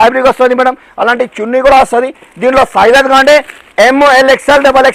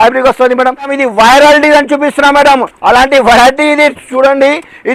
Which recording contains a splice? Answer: second; 1 cut; at 0.9 s

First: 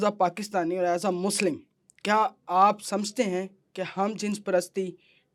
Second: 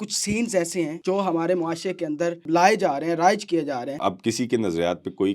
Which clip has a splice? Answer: second; 3 cuts; at 1.0 s, 2.4 s, 3.9 s

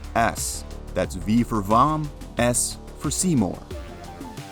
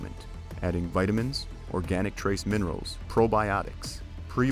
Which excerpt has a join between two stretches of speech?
first; 1 cut; at 3.6 s

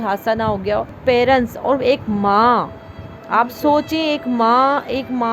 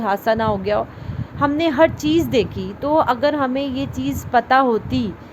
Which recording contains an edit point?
first; 1 cut; at 1.0 s

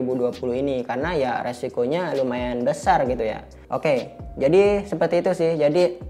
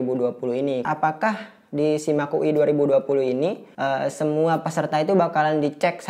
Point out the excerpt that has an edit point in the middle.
second; 2 cuts; at 0.8 s, 3.7 s

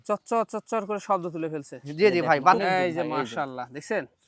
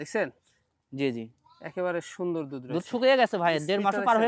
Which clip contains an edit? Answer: first; 1 cut; at 2.6 s

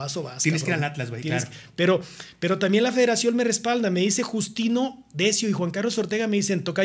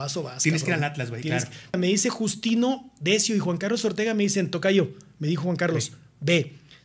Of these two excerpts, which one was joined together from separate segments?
second; 1 cut; at 1.8 s

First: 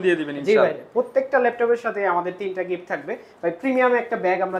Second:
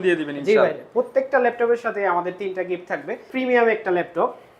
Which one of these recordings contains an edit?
second; 1 cut; at 3.3 s

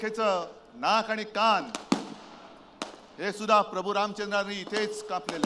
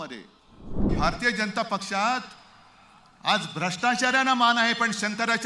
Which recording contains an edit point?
second; 1 cut; at 0.9 s

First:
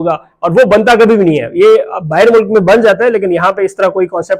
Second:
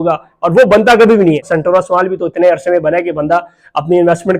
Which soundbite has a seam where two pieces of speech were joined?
second; 1 cut; at 1.5 s

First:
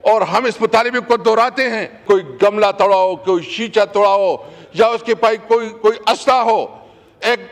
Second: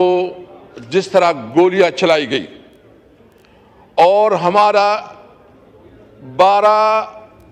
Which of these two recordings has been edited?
first; 1 cut; at 2.0 s

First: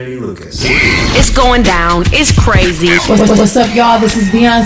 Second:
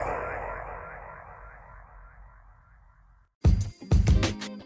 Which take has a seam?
second; 1 cut; at 3.4 s

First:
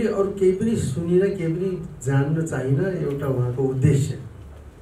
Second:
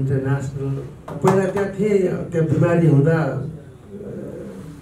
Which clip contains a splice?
second; 1 cut; at 1.0 s

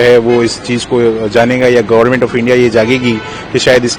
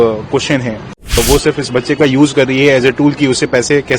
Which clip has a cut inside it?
second; 1 cut; at 1.2 s

